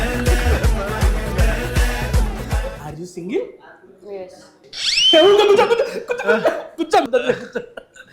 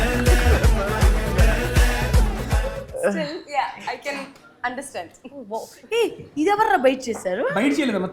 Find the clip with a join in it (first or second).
first